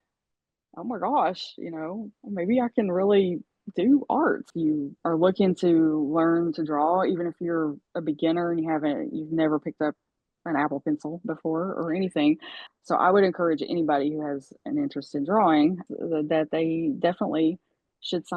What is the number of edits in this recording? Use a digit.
3